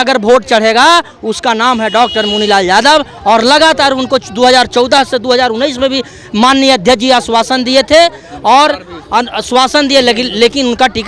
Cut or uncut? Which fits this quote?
uncut